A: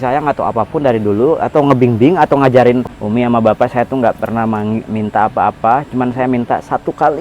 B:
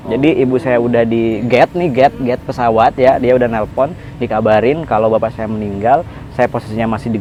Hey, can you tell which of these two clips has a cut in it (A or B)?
A